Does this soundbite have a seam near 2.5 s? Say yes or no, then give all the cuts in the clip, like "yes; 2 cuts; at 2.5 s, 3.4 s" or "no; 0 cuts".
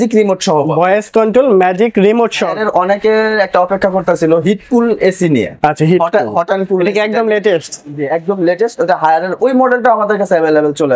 yes; 1 cut; at 2.5 s